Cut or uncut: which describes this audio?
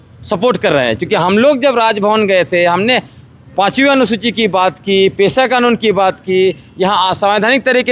uncut